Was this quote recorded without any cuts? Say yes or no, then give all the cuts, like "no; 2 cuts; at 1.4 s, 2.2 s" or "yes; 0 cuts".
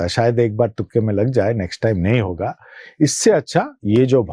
yes; 0 cuts